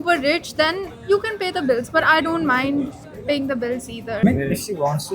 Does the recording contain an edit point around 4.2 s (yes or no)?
yes